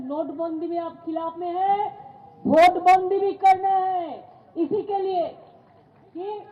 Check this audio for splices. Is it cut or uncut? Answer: uncut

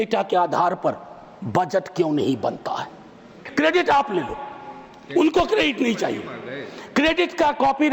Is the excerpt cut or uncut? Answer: cut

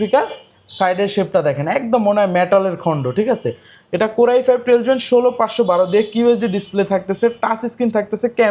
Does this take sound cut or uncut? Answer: uncut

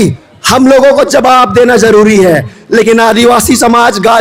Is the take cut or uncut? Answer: uncut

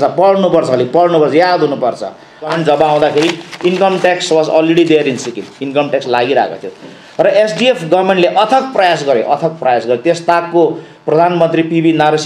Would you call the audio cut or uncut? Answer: cut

